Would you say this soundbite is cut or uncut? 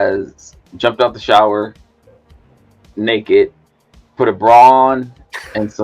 uncut